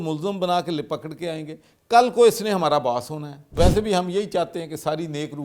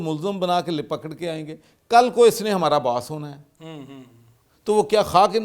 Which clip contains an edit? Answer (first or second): first